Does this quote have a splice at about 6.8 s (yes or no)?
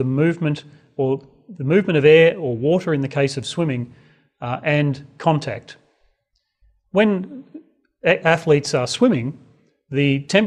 yes